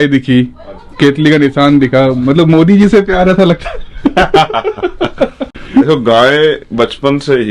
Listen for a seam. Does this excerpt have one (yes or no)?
no